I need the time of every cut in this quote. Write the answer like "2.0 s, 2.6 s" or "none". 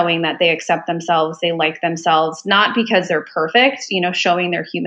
none